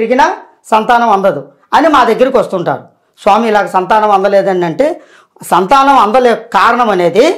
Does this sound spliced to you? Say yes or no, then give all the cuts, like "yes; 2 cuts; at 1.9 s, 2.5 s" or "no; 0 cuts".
no; 0 cuts